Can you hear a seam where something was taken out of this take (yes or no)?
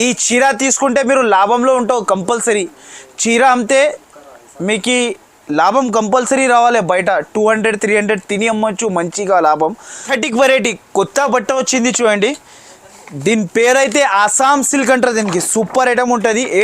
yes